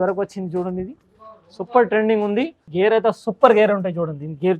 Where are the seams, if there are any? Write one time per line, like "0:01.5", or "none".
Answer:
0:02.6